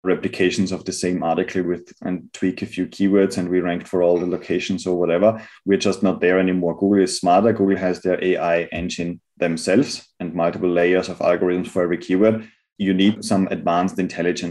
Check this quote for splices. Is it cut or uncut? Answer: cut